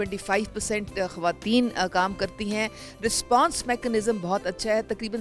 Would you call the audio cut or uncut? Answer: uncut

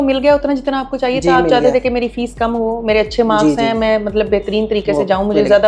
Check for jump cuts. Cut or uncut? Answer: uncut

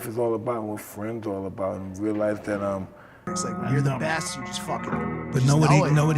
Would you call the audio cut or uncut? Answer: cut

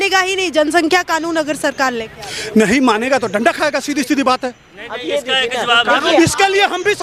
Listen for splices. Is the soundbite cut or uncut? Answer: uncut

